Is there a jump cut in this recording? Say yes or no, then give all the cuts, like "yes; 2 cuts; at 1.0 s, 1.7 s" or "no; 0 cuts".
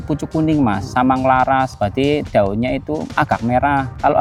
no; 0 cuts